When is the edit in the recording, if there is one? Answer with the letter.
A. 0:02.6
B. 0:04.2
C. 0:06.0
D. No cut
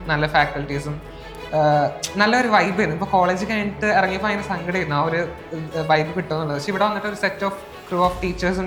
D